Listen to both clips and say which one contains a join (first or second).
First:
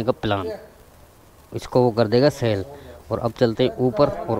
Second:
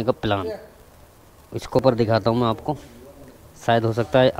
second